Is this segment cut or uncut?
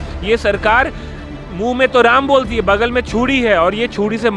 uncut